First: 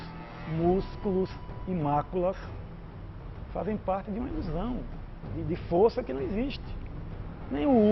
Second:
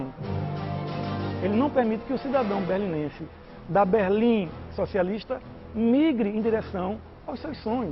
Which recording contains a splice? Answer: first; 1 cut; at 1.1 s

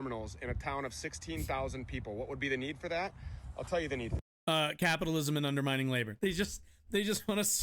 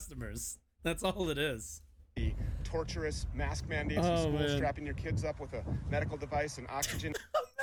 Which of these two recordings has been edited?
first; 1 cut; at 6.1 s

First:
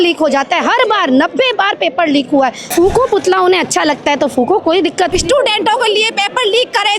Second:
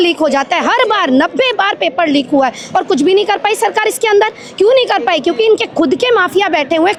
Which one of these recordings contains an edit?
first; 2 cuts; at 2.6 s, 5.1 s

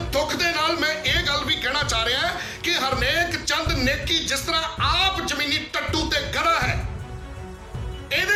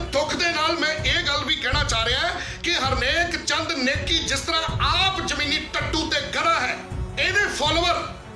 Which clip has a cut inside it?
second; 1 cut; at 7.0 s

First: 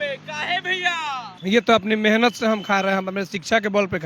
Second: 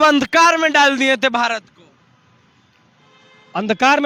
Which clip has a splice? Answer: first; 1 cut; at 1.3 s

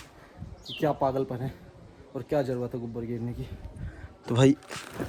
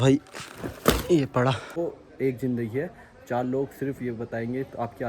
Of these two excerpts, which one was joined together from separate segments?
second; 1 cut; at 1.8 s

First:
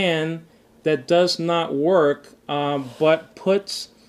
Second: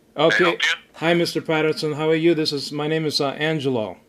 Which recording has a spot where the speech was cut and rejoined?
second; 1 cut; at 1.2 s

